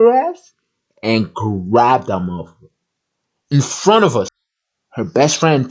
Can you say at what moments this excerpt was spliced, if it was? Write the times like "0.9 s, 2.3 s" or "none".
4.3 s